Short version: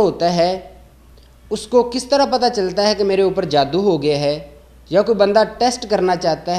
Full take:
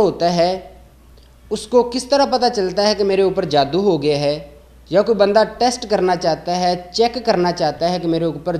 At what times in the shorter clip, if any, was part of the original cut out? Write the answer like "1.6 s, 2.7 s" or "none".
none